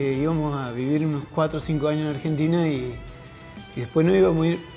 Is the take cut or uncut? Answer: uncut